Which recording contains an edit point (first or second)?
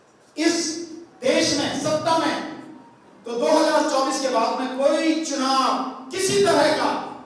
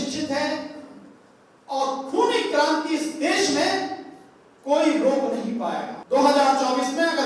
second